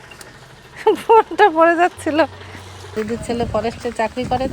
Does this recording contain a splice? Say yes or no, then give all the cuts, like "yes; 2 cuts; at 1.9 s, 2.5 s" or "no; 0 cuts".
yes; 1 cut; at 2.9 s